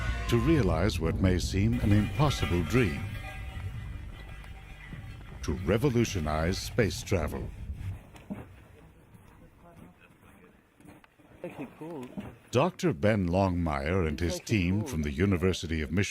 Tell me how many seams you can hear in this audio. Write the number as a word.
one